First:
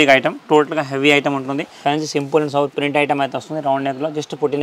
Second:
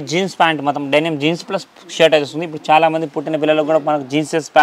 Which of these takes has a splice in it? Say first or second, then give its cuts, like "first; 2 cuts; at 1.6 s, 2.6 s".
first; 1 cut; at 1.7 s